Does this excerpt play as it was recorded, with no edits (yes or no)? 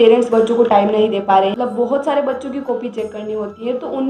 no